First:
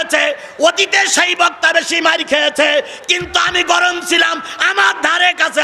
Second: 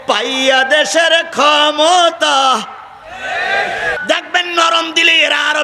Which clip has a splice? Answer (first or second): second